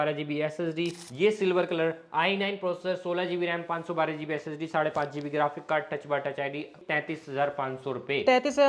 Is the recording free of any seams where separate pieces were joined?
no; 2 cuts; at 1.0 s, 6.8 s

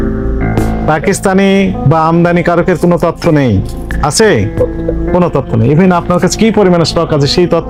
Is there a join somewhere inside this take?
no; 0 cuts

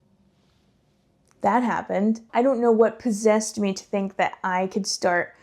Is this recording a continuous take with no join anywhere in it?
no; 1 cut; at 2.2 s

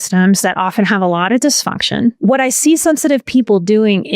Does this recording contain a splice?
yes; 1 cut; at 2.2 s

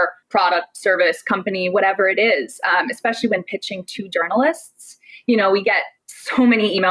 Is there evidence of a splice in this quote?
no; 0 cuts

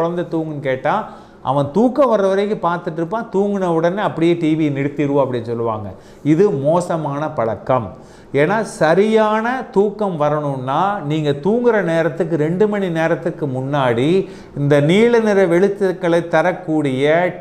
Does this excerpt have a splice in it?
no; 0 cuts

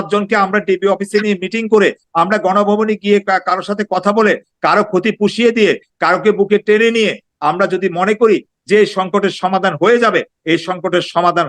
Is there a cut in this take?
no; 0 cuts

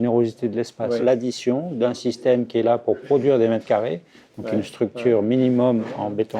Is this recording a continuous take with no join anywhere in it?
no; 1 cut; at 1.0 s

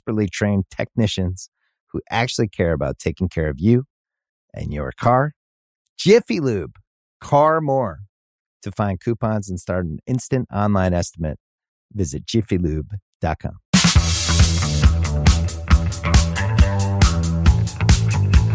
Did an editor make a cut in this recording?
yes; 1 cut; at 13.5 s

